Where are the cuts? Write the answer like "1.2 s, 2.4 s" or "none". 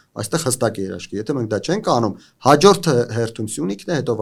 none